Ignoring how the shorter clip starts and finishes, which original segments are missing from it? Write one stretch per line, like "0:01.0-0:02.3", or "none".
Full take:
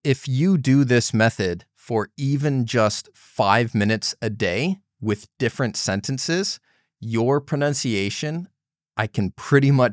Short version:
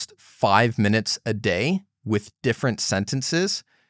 none

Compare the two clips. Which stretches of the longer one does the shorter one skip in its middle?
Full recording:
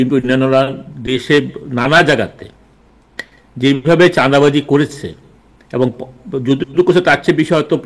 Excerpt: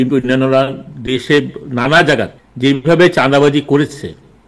0:02.4-0:03.4

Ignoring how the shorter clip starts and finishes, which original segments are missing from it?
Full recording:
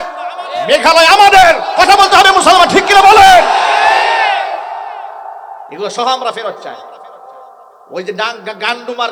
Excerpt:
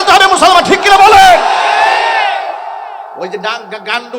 0:05.2-0:07.9

